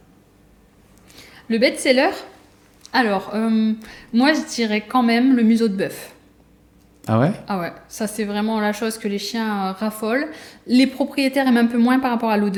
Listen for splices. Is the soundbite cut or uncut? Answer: uncut